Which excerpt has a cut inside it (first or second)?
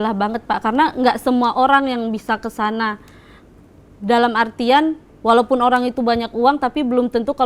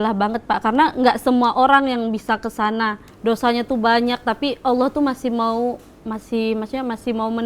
second